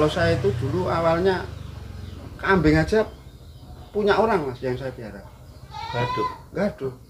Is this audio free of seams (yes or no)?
yes